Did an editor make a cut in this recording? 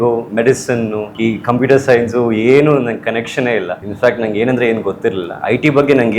yes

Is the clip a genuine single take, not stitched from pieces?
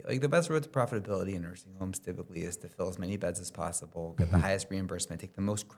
yes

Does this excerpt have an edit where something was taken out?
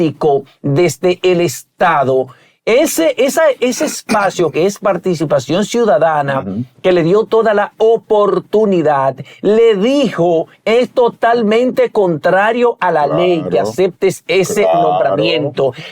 no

